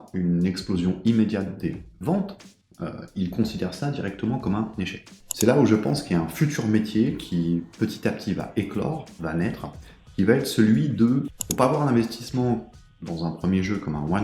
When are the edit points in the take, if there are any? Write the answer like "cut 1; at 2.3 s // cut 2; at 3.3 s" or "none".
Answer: cut 1; at 5.0 s // cut 2; at 11.4 s